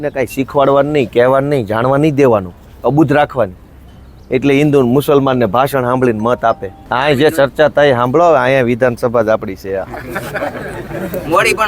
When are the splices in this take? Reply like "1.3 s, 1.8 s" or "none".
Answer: 6.8 s